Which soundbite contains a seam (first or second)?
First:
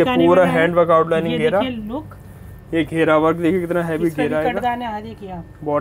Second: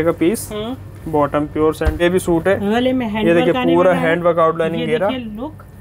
second